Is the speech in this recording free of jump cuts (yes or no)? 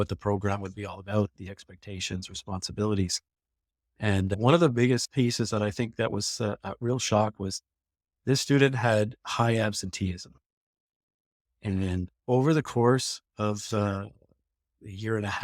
yes